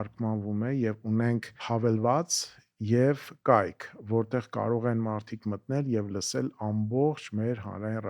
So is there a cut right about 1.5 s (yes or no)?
yes